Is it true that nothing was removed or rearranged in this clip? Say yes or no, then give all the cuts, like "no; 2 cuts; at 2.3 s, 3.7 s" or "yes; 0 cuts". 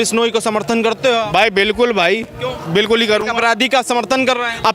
yes; 0 cuts